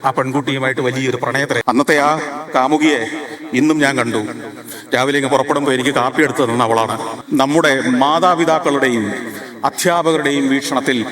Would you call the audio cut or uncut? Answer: cut